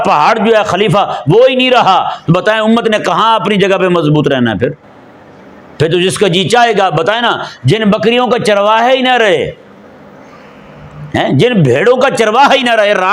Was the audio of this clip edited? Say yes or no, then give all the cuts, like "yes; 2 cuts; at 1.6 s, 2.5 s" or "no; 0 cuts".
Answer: no; 0 cuts